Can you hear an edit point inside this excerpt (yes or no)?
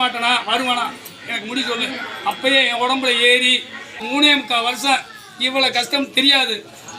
yes